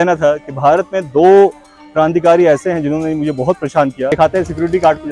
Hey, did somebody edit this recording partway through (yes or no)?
yes